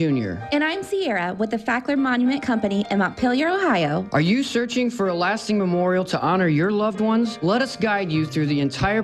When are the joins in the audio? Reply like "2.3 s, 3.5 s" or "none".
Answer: none